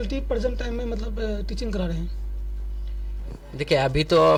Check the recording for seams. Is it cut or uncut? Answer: uncut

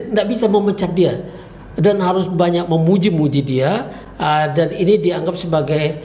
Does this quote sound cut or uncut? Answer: uncut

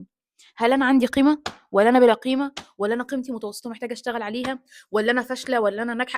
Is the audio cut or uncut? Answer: uncut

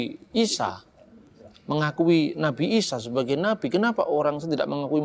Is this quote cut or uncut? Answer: uncut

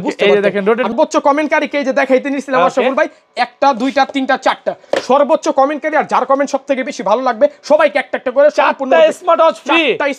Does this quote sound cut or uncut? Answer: cut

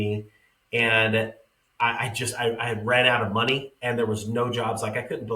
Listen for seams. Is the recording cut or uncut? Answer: uncut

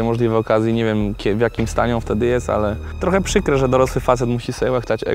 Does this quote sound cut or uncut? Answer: cut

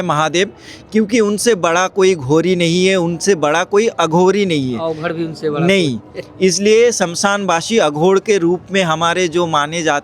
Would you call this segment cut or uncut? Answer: uncut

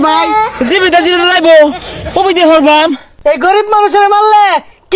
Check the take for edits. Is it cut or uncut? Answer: cut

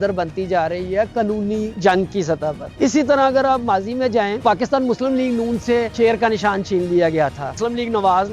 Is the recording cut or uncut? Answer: cut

